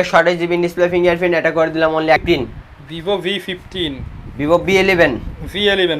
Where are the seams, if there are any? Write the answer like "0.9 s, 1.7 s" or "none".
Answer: 2.2 s